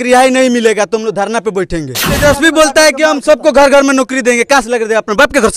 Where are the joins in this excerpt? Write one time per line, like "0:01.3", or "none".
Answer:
0:02.2